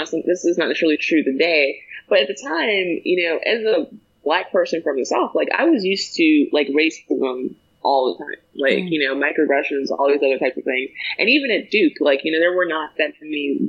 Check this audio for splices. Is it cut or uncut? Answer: uncut